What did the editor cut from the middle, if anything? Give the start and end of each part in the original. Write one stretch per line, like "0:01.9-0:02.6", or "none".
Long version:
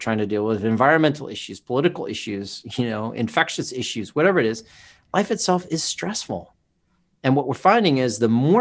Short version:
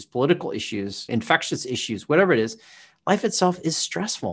0:02.6-0:03.1